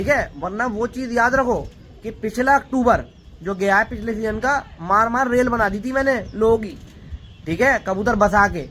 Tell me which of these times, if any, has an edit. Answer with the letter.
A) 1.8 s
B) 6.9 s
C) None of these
C